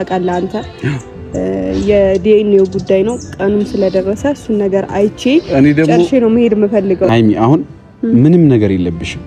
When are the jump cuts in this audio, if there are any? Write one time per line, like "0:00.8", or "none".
0:07.1